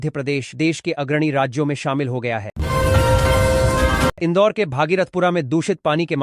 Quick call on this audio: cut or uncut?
uncut